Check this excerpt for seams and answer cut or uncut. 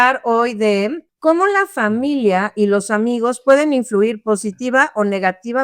cut